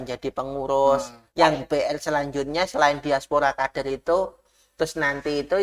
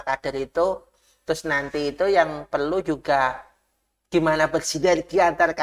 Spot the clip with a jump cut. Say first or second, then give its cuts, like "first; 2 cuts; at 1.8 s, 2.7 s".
first; 1 cut; at 1.2 s